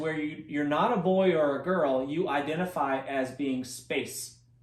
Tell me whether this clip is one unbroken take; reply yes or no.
yes